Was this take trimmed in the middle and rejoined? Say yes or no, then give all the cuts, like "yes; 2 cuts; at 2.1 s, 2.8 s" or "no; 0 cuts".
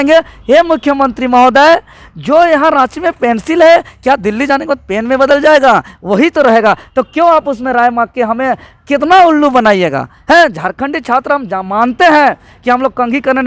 no; 0 cuts